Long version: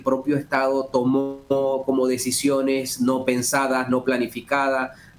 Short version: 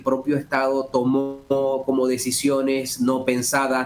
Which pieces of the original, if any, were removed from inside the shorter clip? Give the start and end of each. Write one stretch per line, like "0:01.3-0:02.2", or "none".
none